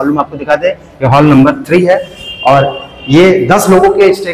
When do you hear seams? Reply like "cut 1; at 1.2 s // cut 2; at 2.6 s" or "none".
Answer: none